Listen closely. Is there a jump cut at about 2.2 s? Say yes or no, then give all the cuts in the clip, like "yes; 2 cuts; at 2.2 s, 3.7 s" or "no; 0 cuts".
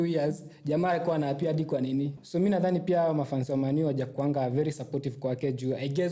yes; 1 cut; at 2.2 s